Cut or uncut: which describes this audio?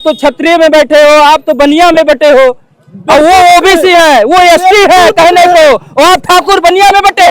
uncut